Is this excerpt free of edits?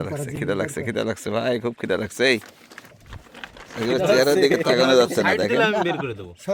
yes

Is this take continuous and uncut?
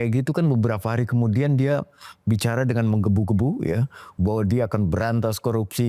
yes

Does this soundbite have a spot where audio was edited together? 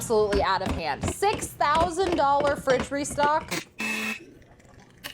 yes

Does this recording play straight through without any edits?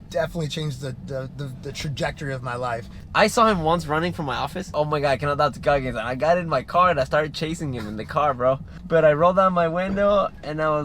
no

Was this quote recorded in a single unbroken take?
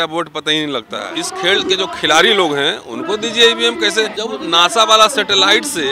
no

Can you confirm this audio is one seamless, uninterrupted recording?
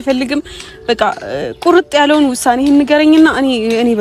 yes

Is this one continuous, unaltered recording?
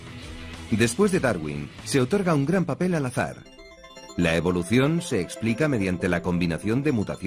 no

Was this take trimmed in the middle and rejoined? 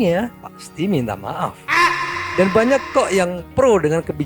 yes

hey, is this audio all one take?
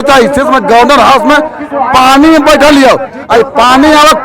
yes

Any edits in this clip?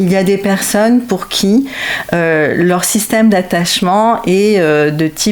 no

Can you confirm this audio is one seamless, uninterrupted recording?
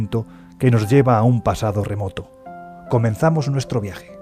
no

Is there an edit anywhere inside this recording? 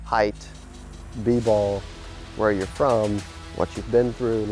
no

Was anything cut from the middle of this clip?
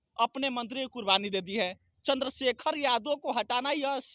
yes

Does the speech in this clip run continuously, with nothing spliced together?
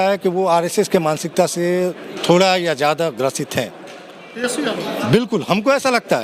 yes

